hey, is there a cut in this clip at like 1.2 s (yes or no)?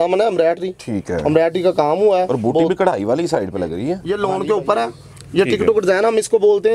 no